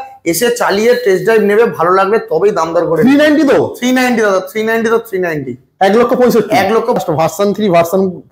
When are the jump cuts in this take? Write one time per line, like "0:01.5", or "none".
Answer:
0:07.0